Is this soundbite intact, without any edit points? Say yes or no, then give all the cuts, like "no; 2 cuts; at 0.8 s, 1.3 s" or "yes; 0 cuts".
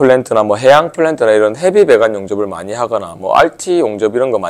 yes; 0 cuts